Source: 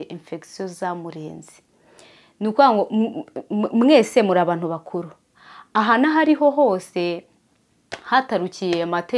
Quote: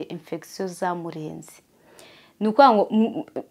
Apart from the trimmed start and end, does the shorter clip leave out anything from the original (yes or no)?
no